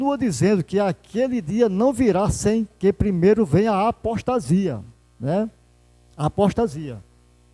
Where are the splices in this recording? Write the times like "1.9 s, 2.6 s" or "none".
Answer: none

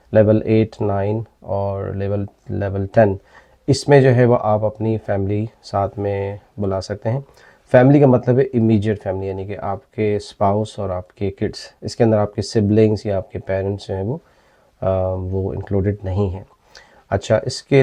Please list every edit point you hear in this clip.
none

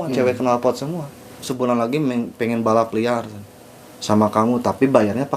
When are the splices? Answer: 1.4 s

